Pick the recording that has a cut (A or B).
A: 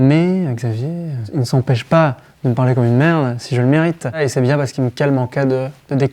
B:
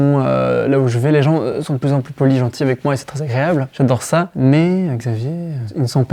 A